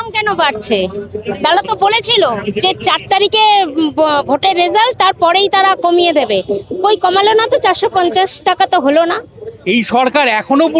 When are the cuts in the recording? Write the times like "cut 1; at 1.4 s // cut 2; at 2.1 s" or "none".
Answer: cut 1; at 1.2 s // cut 2; at 9.5 s